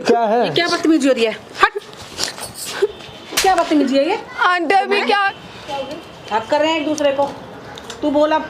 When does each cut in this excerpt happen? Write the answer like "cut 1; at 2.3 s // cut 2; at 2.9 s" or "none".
cut 1; at 5.3 s